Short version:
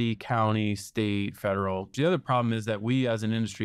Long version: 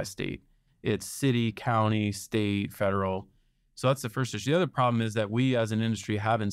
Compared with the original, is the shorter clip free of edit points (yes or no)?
no